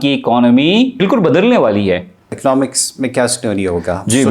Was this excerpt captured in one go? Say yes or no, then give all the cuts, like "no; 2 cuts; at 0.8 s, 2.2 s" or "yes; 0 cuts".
no; 2 cuts; at 1.0 s, 2.3 s